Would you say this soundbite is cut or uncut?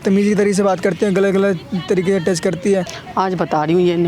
cut